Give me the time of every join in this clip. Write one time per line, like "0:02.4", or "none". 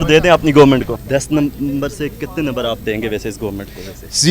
0:01.0